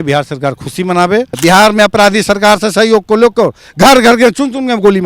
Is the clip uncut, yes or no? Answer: no